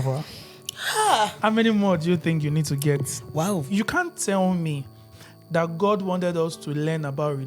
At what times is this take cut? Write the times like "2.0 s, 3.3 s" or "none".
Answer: 3.7 s